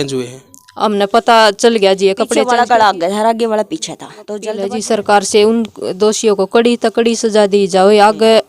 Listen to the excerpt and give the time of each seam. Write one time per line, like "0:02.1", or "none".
0:02.3
0:04.6